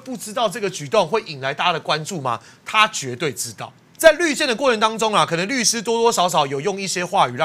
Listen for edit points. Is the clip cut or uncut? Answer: cut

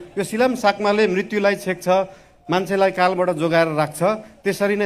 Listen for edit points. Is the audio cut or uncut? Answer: uncut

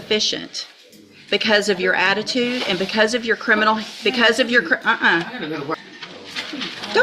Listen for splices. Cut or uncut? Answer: cut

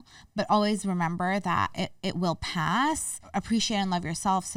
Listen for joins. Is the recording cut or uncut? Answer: cut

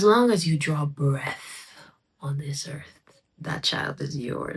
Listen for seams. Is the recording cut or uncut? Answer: uncut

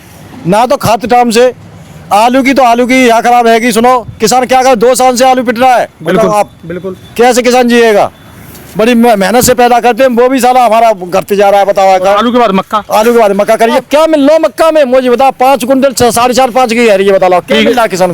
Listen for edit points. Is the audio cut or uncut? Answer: cut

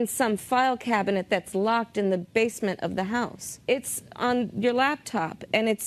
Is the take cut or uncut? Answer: cut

